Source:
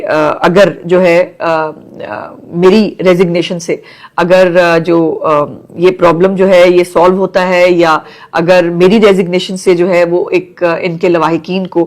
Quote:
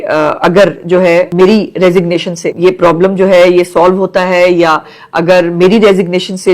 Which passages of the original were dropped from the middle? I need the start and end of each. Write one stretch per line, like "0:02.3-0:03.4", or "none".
0:01.3-0:02.5
0:03.7-0:05.6